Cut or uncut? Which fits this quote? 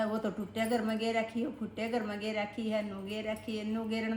uncut